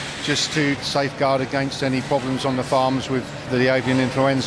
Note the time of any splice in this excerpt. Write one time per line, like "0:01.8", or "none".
0:00.8
0:03.5